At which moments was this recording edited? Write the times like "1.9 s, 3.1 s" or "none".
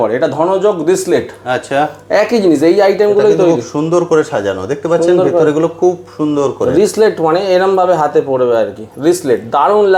none